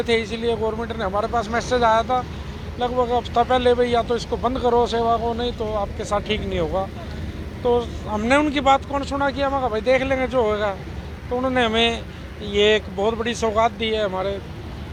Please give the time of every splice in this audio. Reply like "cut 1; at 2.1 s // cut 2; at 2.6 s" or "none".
none